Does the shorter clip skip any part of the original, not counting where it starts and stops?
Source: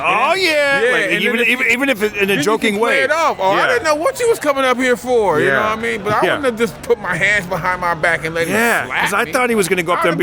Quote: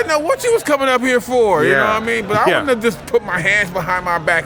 no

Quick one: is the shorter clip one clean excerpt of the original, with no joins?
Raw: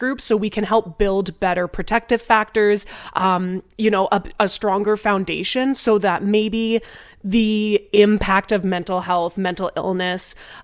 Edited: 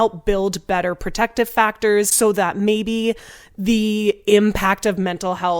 no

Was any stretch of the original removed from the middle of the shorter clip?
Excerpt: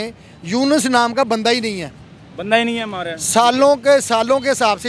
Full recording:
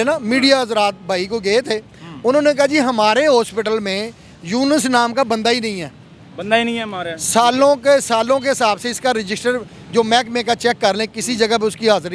no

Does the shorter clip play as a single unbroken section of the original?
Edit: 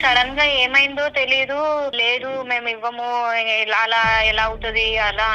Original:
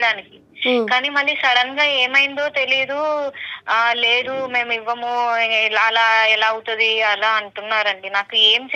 no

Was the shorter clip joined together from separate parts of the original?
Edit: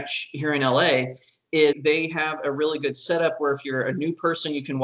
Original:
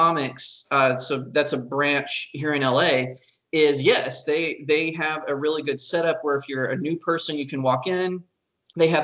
yes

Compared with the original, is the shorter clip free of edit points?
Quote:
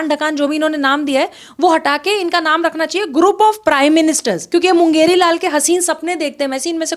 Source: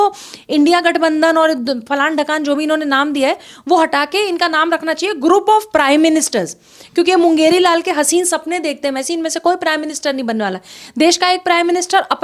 no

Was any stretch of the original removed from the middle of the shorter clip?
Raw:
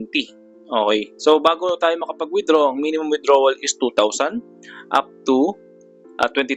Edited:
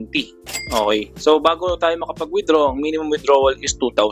no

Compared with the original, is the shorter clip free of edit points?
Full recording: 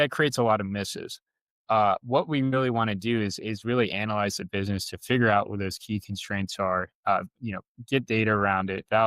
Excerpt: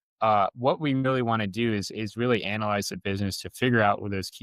yes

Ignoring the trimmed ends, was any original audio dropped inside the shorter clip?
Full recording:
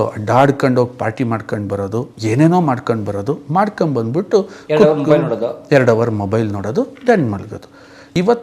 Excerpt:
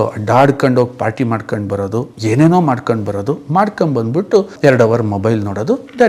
yes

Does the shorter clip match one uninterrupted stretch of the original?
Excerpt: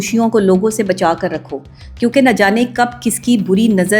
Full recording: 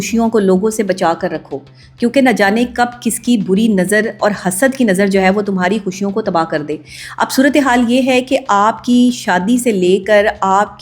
yes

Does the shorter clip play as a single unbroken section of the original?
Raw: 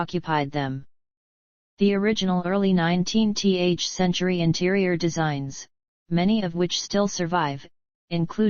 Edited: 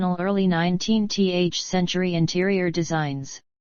yes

